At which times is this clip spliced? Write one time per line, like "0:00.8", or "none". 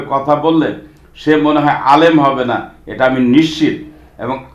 none